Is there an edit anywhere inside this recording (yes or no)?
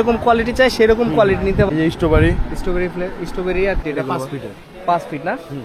yes